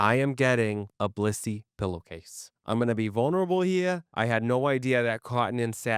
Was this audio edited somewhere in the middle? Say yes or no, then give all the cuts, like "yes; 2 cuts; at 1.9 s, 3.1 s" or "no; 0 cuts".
no; 0 cuts